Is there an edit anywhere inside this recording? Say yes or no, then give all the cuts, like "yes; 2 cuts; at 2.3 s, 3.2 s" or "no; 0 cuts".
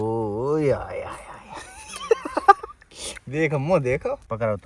no; 0 cuts